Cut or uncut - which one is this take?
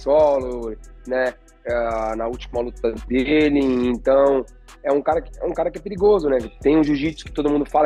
uncut